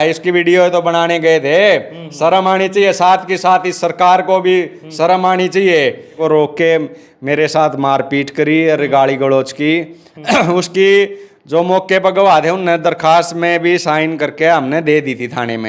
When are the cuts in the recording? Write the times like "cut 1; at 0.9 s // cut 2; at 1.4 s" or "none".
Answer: cut 1; at 6.2 s

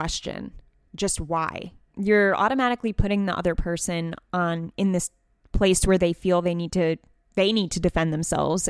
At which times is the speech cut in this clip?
cut 1; at 1.9 s

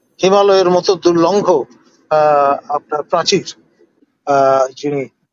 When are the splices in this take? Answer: cut 1; at 3.9 s

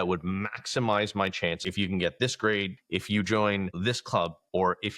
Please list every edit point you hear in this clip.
cut 1; at 1.7 s // cut 2; at 2.8 s

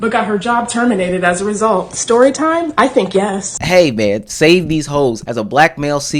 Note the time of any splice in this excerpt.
cut 1; at 3.5 s // cut 2; at 5.2 s

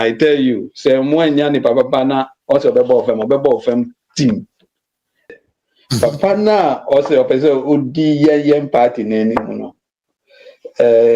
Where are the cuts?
cut 1; at 5.3 s

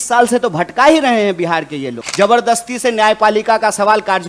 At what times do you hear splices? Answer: cut 1; at 2.0 s

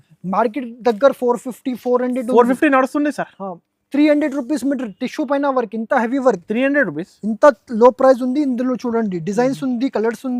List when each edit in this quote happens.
none

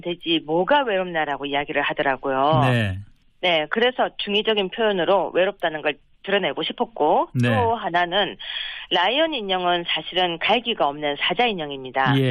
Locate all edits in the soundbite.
cut 1; at 6.6 s

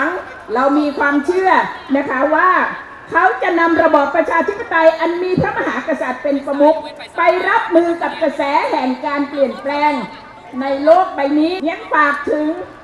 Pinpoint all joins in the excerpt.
cut 1; at 11.6 s

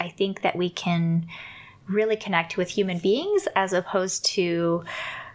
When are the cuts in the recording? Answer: none

